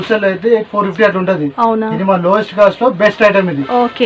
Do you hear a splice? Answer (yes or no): no